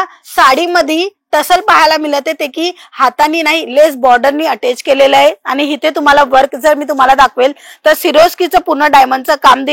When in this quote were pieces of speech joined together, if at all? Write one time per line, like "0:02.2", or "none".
none